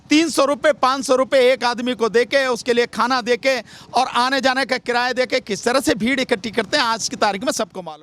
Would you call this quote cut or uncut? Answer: uncut